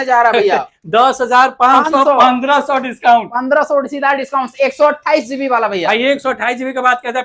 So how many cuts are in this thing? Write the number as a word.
zero